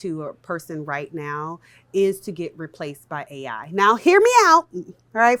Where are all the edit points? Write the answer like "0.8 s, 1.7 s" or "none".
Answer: none